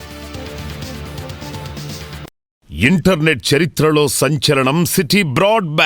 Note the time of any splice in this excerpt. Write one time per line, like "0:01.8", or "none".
0:02.6